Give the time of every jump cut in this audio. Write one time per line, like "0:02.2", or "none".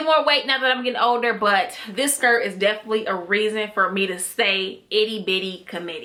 none